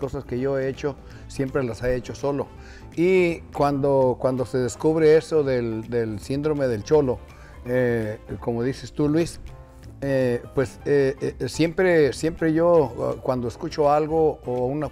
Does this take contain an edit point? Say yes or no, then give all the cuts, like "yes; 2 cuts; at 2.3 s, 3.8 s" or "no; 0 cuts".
no; 0 cuts